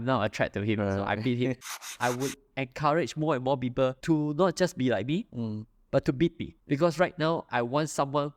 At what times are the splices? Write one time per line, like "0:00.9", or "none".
0:01.9
0:04.0
0:06.5